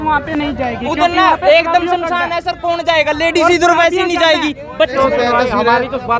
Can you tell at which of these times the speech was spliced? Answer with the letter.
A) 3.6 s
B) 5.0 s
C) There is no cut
B